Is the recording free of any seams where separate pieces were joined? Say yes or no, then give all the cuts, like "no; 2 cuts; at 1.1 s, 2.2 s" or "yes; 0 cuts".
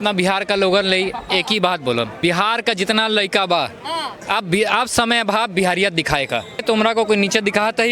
no; 2 cuts; at 2.1 s, 6.6 s